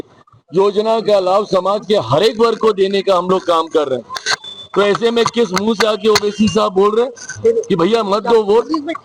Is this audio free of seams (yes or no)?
yes